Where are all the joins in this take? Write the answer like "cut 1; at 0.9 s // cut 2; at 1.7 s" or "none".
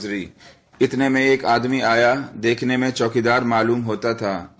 cut 1; at 1.7 s